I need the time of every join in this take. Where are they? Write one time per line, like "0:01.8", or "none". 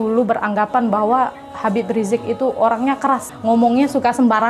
0:03.3